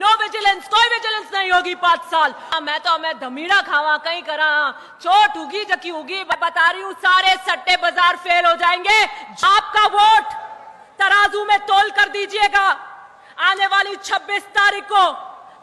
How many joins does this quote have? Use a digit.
3